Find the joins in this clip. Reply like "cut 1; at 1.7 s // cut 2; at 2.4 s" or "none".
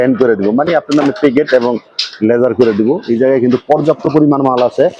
none